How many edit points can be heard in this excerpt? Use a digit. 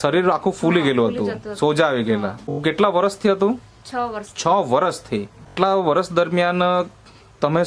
2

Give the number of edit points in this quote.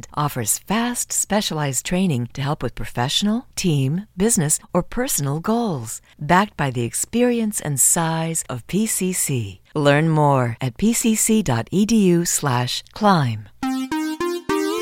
1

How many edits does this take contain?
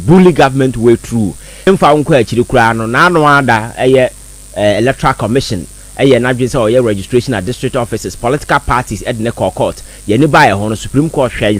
1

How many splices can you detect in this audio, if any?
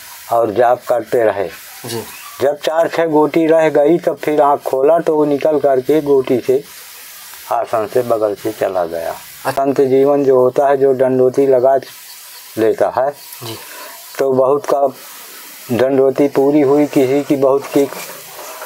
1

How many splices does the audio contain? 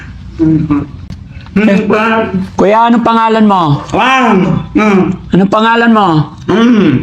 0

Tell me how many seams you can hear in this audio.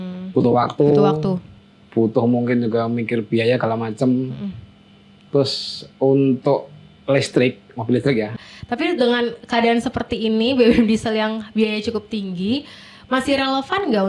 1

